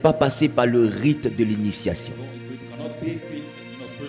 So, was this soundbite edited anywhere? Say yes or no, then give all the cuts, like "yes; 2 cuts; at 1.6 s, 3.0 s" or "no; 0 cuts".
no; 0 cuts